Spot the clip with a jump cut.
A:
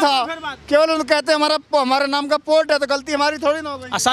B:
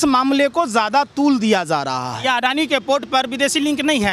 B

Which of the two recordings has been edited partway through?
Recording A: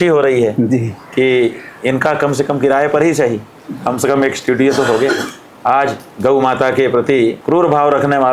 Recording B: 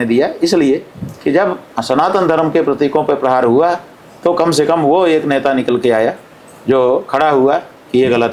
A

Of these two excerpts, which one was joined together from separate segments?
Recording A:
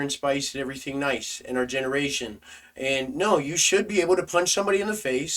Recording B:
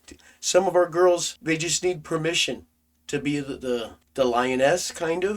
B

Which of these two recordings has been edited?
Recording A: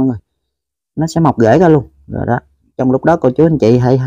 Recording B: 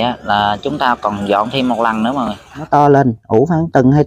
B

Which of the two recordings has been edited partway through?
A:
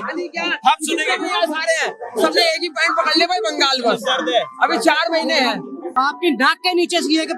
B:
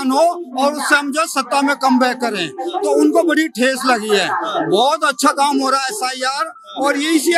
A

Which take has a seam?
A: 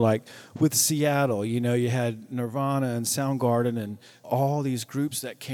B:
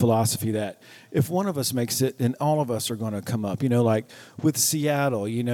A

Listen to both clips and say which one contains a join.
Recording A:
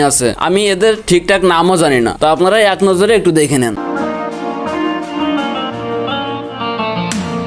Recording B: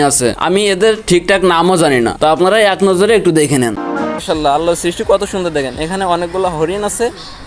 B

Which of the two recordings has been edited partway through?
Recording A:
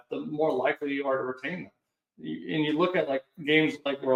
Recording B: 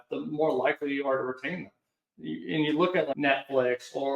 B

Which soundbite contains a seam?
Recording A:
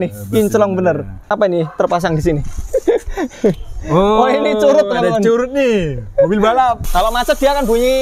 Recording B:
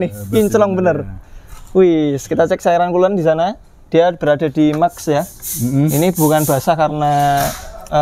A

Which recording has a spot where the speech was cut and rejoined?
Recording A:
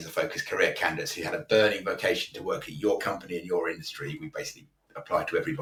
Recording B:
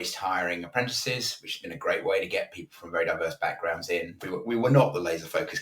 B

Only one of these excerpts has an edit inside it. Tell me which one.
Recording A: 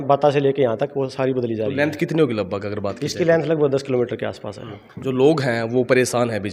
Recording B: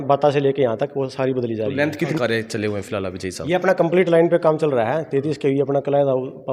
B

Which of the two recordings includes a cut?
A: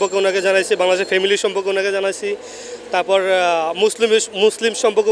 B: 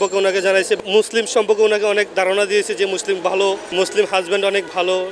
B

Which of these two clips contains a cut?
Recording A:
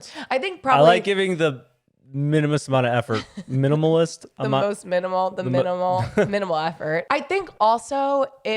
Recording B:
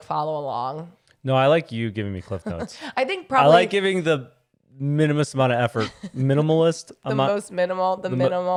A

